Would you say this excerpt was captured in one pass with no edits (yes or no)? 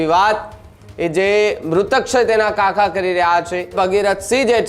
no